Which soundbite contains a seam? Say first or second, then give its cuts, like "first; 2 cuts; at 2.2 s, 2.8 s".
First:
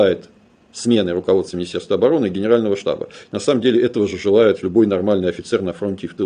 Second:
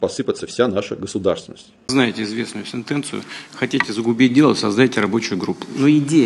second; 1 cut; at 1.8 s